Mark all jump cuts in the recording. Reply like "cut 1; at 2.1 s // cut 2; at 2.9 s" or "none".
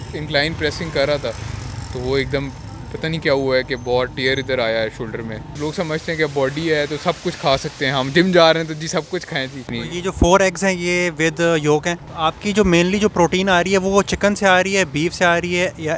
cut 1; at 5.4 s // cut 2; at 9.7 s // cut 3; at 12.1 s